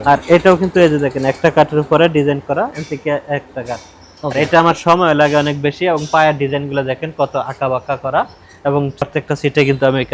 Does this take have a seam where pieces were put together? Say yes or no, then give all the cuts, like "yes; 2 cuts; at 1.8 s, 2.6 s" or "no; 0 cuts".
no; 0 cuts